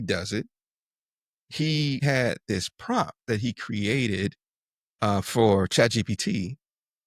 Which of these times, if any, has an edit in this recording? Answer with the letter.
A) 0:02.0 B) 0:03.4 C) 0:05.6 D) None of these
A